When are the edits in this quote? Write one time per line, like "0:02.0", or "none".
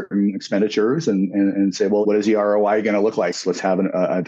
0:02.0
0:03.3

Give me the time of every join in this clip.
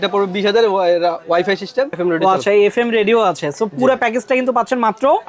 0:01.9

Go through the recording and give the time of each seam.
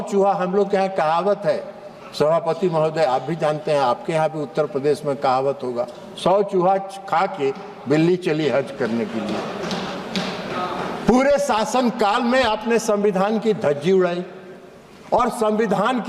none

